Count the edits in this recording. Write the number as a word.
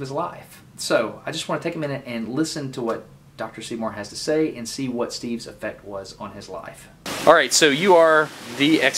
one